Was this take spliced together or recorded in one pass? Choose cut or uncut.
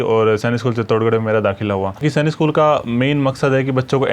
cut